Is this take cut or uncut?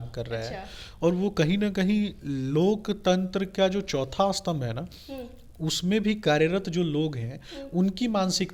uncut